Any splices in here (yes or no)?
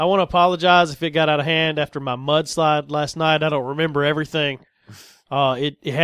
no